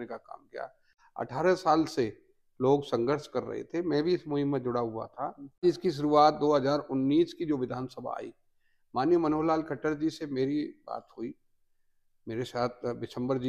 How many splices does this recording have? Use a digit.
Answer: 2